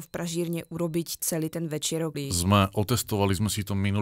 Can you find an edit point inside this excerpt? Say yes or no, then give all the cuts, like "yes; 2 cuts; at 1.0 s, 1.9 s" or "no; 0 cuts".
yes; 1 cut; at 2.2 s